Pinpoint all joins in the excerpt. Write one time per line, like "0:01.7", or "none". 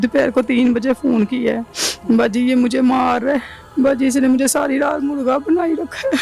0:03.6